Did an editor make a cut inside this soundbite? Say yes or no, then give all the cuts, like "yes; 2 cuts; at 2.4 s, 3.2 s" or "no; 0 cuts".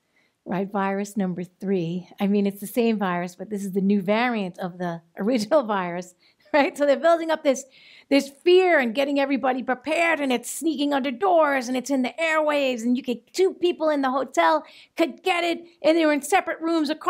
no; 0 cuts